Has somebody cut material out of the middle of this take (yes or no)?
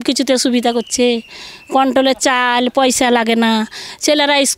no